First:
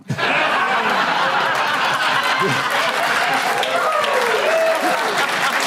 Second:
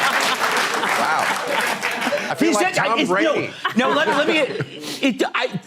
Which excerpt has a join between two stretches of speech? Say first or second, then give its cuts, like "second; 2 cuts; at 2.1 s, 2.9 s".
second; 1 cut; at 3.6 s